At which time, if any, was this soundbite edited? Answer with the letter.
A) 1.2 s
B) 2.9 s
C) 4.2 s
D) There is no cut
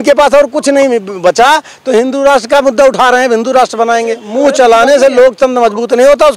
C